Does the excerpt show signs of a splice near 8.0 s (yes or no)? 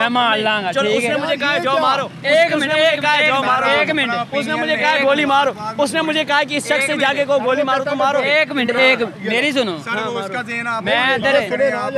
no